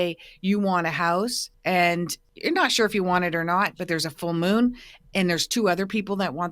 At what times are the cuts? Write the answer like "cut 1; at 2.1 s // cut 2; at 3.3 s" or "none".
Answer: cut 1; at 1.5 s // cut 2; at 2.2 s